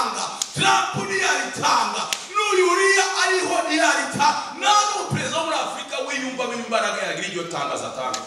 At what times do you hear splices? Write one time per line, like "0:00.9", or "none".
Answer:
none